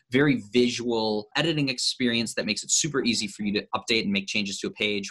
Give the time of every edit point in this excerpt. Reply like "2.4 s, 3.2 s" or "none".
1.3 s